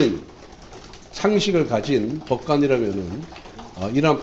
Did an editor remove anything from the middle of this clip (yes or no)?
no